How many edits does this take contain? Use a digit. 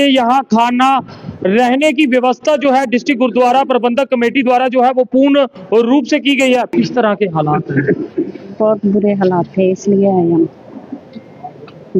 1